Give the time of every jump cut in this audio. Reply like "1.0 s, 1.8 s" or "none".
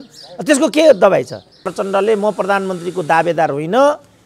1.6 s